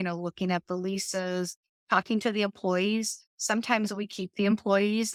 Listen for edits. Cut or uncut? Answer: uncut